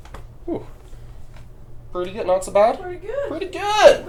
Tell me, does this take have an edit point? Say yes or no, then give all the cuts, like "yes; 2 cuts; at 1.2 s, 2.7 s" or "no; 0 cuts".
no; 0 cuts